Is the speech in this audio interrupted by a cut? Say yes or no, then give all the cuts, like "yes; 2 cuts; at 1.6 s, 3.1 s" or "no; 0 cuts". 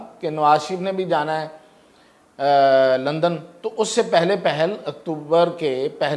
no; 0 cuts